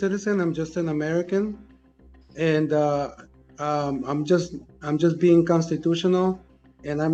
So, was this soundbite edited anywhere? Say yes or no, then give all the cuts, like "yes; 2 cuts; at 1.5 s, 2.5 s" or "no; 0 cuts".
no; 0 cuts